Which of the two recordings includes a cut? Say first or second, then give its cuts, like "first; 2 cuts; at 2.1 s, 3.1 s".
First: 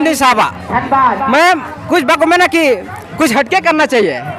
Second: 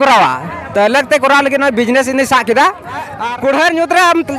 second; 1 cut; at 3.1 s